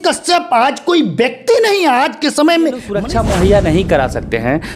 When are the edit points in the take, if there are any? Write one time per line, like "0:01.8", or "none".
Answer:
0:02.9

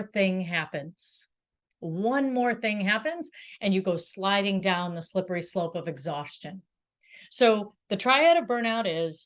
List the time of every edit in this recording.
none

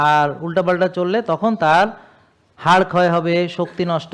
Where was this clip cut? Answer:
none

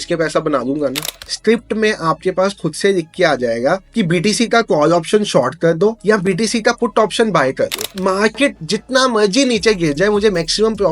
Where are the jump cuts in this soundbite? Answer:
0:01.1
0:07.9

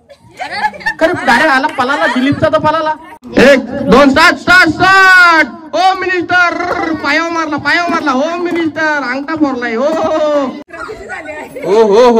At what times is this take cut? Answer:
0:03.1
0:10.6

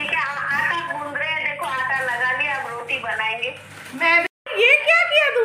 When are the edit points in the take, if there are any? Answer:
0:04.3

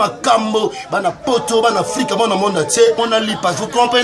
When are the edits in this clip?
0:03.0

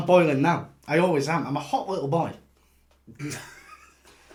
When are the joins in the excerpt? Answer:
none

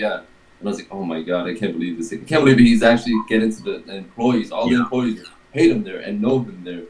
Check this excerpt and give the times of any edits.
none

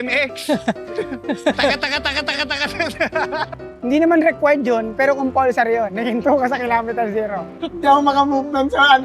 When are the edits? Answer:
0:03.6
0:07.5

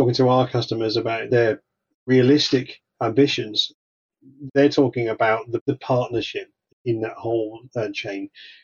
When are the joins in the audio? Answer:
0:01.2

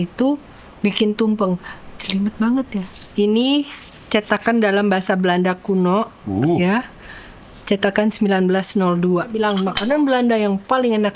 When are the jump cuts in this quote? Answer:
0:02.9
0:09.3

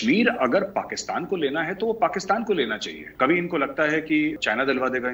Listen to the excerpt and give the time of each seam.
0:03.0
0:04.4

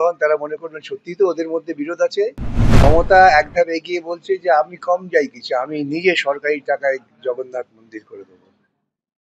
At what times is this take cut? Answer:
0:02.8

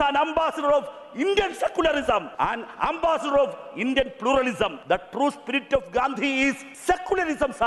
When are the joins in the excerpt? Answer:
0:02.3
0:04.8
0:06.7

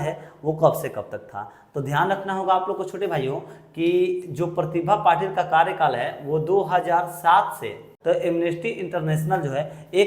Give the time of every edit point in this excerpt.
0:07.9

